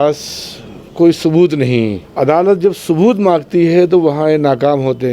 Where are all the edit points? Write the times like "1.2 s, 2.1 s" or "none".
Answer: 2.0 s

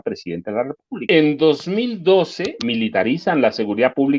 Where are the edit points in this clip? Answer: 1.0 s, 2.5 s

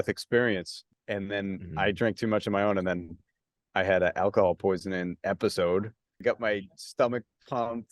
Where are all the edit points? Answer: 1.0 s, 6.2 s

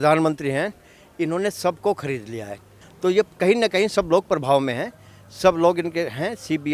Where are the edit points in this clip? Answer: none

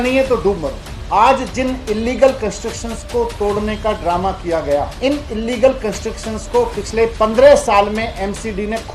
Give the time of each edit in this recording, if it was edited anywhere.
0.9 s

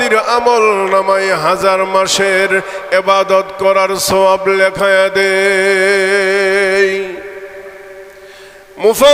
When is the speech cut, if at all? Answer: none

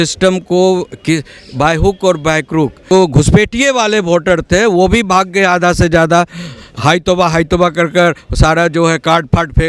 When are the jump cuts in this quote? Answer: 2.9 s

